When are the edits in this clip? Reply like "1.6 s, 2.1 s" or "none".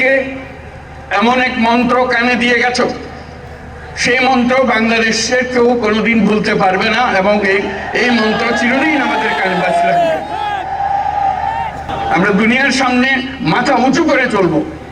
11.9 s

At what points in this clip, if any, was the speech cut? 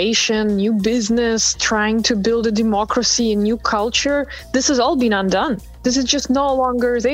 5.7 s

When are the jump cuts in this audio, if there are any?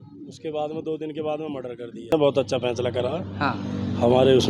2.1 s

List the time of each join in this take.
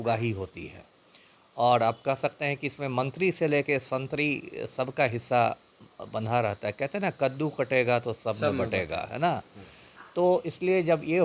none

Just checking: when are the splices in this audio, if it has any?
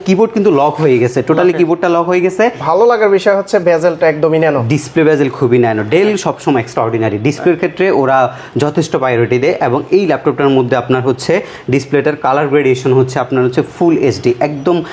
2.6 s

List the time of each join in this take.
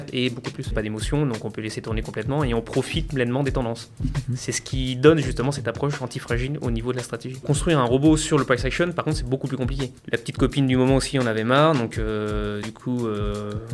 0.7 s, 7.4 s, 9.9 s

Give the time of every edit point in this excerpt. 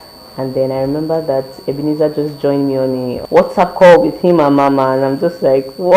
3.2 s

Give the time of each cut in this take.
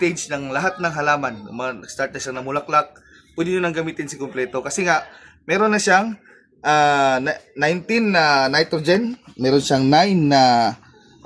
none

